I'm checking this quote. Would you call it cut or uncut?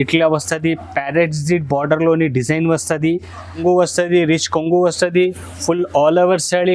cut